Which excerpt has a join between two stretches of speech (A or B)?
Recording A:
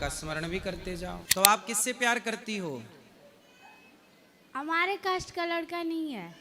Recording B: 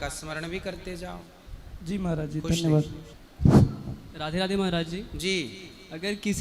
A